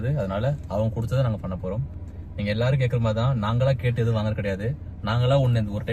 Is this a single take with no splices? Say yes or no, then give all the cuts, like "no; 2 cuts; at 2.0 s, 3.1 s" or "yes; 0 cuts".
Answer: yes; 0 cuts